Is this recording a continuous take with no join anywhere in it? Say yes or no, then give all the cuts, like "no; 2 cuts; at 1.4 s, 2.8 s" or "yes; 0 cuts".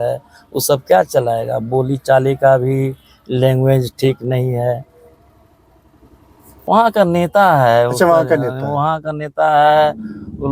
no; 1 cut; at 7.0 s